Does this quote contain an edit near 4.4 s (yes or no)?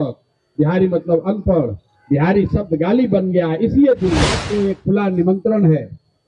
yes